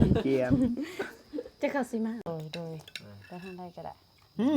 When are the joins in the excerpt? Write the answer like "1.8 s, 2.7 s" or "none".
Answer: 2.2 s